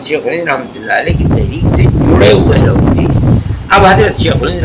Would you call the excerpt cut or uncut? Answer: uncut